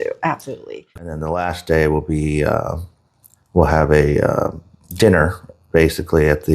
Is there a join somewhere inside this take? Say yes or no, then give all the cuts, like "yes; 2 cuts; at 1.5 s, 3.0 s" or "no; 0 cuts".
yes; 1 cut; at 1.1 s